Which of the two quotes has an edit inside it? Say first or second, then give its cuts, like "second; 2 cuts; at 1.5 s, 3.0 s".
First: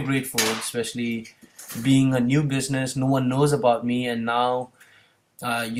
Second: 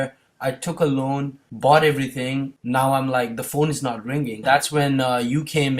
second; 3 cuts; at 1.4 s, 2.6 s, 4.4 s